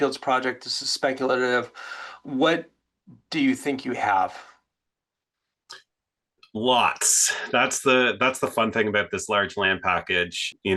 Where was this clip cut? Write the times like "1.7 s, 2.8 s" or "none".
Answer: none